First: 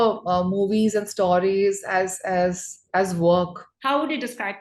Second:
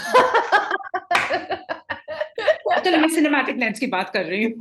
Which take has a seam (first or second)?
first